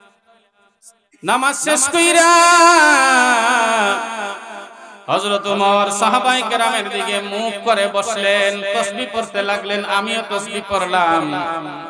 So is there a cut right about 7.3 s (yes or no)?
no